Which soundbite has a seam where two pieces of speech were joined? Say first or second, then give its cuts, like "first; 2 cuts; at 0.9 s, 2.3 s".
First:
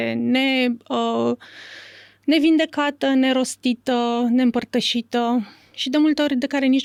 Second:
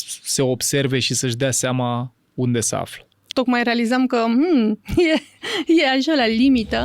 second; 1 cut; at 3.3 s